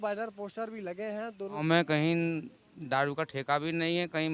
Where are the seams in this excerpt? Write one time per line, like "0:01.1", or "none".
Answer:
0:01.6